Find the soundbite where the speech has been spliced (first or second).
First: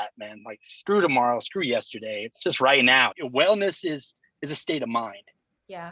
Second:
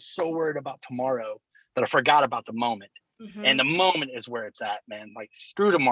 first